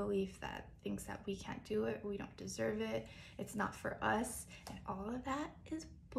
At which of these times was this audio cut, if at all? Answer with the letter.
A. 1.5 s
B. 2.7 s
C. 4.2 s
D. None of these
D